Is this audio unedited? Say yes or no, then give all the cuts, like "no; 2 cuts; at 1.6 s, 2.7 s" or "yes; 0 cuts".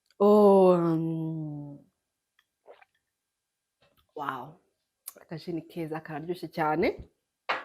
yes; 0 cuts